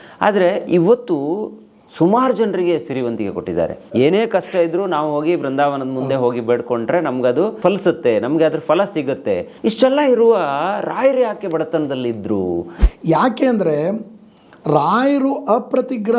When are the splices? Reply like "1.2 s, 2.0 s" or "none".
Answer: 4.0 s, 7.6 s, 9.5 s, 12.7 s

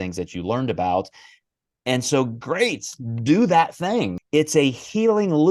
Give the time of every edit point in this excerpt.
4.2 s

